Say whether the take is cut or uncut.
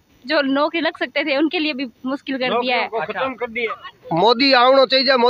cut